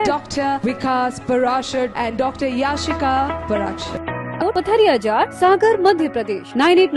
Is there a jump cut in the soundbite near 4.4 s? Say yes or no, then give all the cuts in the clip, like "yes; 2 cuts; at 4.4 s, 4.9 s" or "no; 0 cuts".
yes; 1 cut; at 4.4 s